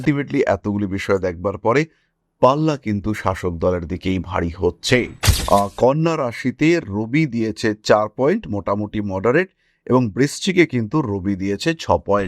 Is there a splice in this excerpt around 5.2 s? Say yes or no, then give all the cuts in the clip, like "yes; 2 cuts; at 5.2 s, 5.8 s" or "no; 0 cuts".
yes; 1 cut; at 5.2 s